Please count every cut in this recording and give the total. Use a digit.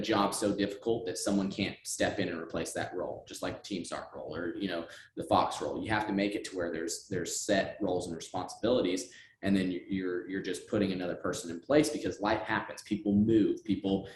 0